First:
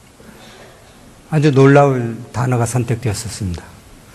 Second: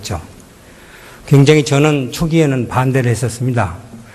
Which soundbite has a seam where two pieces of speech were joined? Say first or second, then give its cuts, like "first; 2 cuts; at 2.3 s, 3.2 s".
second; 1 cut; at 1.6 s